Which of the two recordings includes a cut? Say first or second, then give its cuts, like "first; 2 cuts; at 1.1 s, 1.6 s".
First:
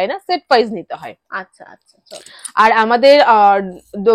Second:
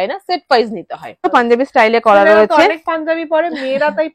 second; 1 cut; at 1.2 s